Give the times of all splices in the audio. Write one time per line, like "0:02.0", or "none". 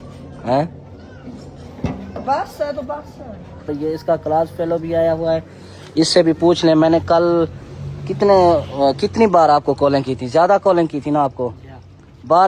0:03.7